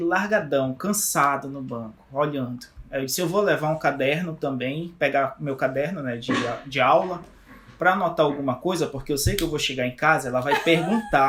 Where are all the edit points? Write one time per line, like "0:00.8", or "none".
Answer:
none